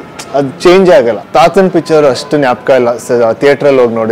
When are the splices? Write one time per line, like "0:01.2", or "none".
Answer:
0:01.2